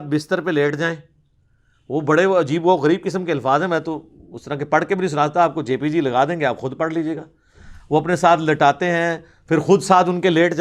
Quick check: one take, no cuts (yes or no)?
yes